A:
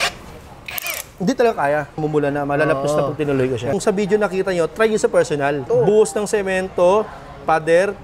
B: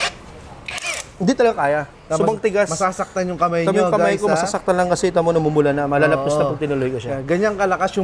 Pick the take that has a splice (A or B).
A